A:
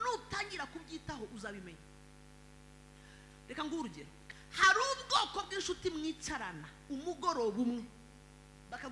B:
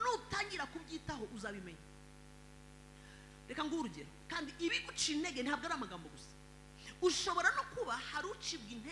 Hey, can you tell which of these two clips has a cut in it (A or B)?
A